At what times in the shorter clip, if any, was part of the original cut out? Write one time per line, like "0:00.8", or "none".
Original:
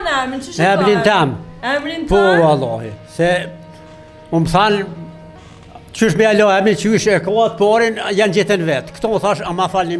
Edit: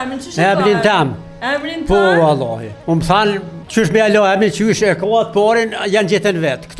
0:02.7
0:03.6